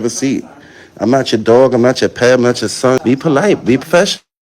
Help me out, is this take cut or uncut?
cut